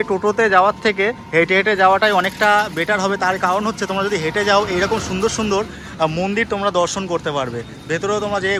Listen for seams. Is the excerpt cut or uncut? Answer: uncut